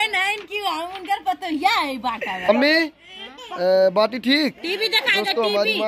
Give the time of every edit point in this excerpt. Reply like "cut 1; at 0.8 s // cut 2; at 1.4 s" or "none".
cut 1; at 2.5 s